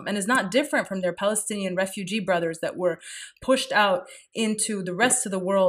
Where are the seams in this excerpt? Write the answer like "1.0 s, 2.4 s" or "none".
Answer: none

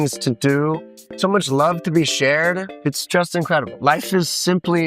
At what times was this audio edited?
1.1 s, 2.7 s

